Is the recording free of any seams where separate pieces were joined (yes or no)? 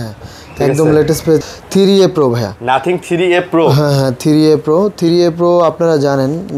no